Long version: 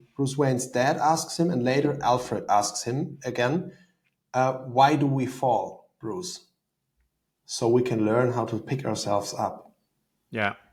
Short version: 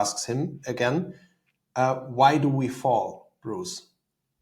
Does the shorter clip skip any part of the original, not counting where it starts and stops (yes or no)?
no